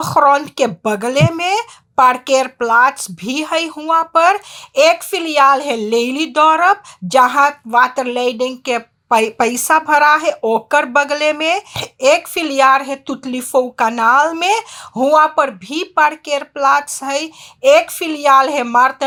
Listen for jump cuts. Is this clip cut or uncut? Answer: uncut